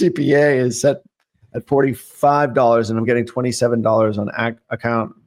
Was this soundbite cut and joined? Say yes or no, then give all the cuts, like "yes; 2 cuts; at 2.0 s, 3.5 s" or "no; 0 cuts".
no; 0 cuts